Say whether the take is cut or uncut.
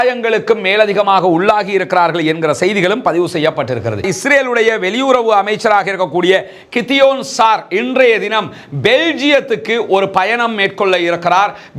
cut